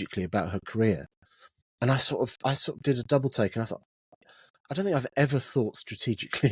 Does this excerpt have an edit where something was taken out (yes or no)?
no